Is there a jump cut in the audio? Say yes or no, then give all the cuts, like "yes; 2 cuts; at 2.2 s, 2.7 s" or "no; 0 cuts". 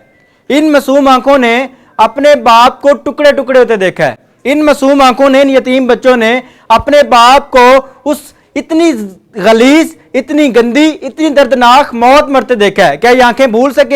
no; 0 cuts